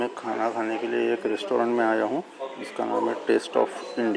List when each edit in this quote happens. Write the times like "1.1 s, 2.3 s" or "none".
none